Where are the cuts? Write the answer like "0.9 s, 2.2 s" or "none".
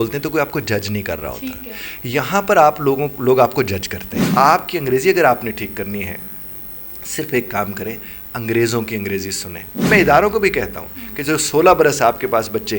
4.3 s, 9.9 s